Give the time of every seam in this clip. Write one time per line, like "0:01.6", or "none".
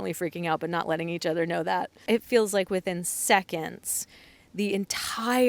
0:01.9